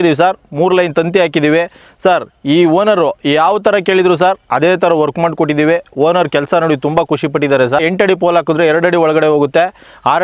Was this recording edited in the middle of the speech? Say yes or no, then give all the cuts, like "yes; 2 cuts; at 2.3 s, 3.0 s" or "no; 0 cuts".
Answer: yes; 1 cut; at 7.8 s